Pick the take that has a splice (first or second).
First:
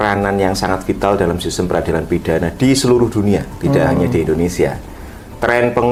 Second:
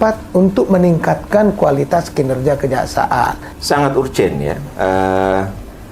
second